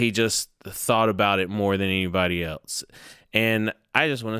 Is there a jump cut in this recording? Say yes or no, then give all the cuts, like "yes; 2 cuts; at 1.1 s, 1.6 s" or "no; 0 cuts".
no; 0 cuts